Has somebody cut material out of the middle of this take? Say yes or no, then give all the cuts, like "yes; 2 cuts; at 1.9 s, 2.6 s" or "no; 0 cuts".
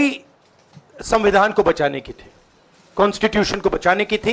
no; 0 cuts